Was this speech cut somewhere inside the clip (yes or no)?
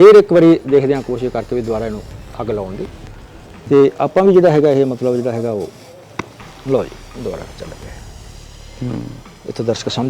yes